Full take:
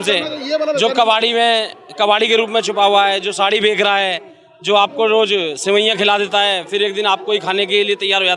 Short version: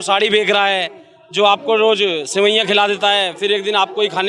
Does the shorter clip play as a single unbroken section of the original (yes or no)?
yes